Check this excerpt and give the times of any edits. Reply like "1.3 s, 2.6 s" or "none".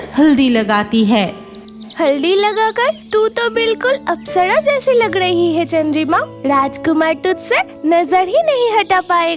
none